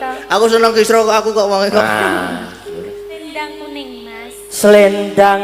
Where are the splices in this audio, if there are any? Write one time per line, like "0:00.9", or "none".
0:03.2